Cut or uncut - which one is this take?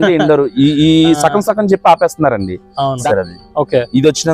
cut